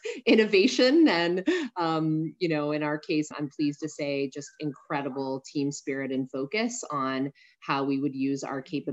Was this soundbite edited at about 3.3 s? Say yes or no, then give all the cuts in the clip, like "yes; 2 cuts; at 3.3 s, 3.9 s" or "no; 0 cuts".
yes; 1 cut; at 3.3 s